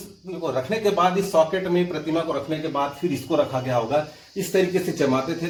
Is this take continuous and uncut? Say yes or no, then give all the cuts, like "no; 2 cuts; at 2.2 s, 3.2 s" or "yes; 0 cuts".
yes; 0 cuts